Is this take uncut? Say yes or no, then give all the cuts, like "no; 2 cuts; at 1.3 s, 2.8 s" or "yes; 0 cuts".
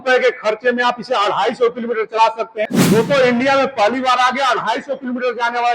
no; 1 cut; at 2.7 s